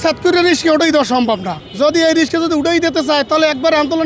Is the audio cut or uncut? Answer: cut